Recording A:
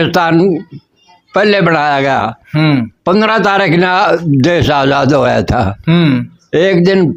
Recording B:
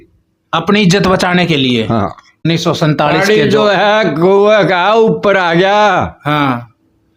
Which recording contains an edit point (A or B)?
B